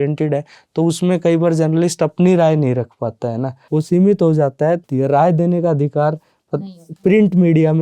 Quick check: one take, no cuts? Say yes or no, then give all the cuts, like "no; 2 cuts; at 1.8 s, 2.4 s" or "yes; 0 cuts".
no; 2 cuts; at 3.6 s, 4.8 s